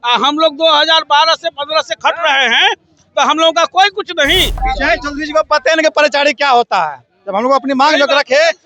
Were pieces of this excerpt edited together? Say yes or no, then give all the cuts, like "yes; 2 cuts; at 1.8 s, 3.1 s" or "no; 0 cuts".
yes; 1 cut; at 4.6 s